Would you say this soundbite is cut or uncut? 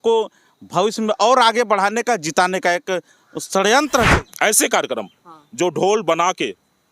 cut